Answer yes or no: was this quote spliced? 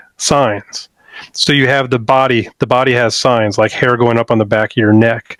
no